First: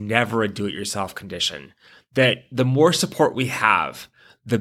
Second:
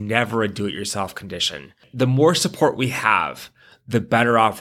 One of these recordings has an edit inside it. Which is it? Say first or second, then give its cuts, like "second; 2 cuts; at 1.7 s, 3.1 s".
second; 1 cut; at 1.9 s